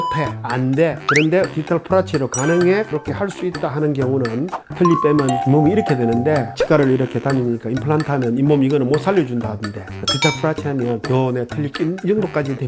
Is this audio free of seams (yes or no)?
no